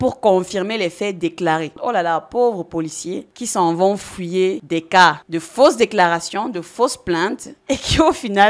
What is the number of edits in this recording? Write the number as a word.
two